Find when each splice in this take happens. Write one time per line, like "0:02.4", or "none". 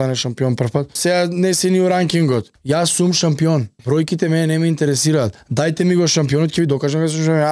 0:01.0
0:02.5
0:03.7
0:05.4